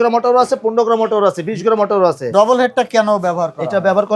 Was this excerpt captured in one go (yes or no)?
no